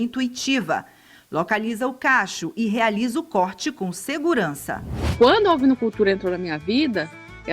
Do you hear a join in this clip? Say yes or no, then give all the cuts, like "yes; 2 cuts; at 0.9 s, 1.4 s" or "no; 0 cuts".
yes; 1 cut; at 5.1 s